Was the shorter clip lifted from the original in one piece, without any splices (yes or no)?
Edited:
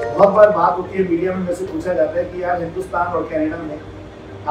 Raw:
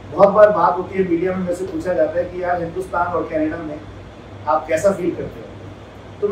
yes